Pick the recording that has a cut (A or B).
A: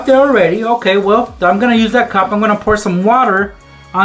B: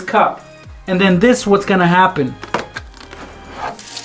B